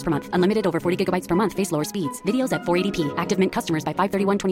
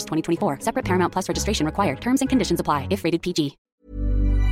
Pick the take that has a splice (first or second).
second